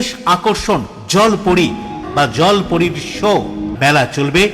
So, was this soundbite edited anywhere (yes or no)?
yes